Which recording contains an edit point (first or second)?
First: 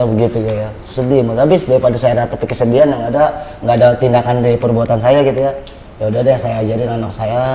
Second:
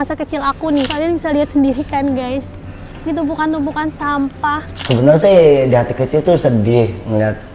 second